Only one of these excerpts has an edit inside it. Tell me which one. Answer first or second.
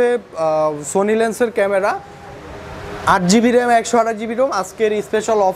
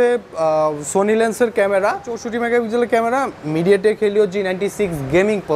second